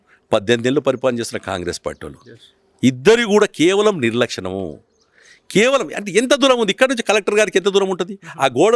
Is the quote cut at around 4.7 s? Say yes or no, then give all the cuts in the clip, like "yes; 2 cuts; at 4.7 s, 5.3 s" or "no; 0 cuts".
no; 0 cuts